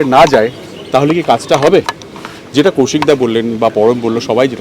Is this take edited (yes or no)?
no